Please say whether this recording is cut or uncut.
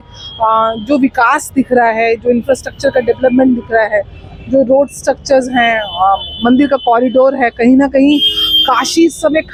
uncut